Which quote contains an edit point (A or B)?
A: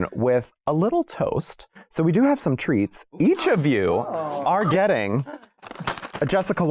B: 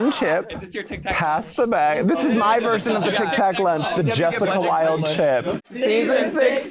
B